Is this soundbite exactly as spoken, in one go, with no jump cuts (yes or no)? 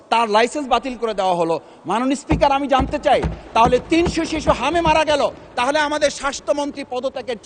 yes